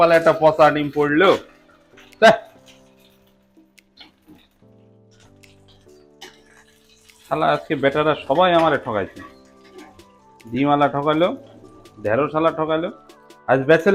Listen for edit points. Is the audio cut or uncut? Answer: uncut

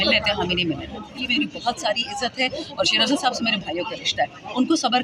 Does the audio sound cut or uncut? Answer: cut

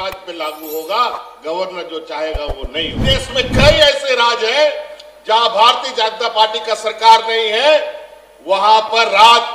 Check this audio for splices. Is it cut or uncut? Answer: cut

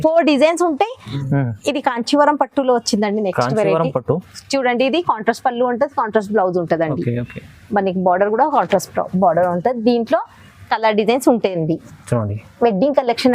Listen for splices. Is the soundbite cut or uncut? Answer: cut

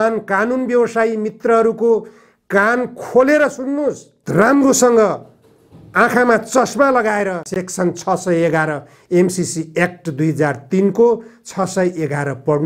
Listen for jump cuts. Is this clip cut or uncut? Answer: uncut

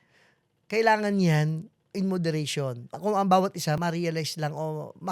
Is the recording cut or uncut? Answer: cut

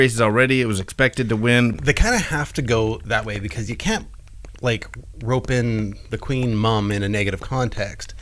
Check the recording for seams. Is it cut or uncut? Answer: cut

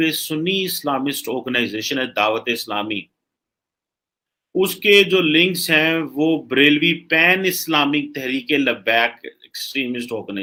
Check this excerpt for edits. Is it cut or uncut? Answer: uncut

